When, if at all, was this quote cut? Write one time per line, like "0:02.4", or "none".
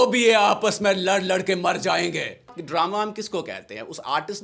0:02.6